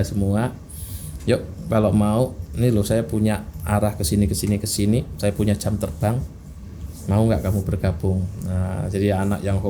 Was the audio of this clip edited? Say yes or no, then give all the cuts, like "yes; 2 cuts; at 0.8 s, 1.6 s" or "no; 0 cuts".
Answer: no; 0 cuts